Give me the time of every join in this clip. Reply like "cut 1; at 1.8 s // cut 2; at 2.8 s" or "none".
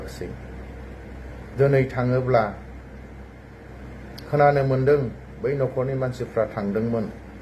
none